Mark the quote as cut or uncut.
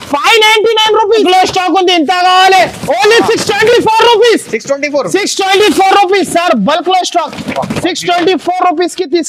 cut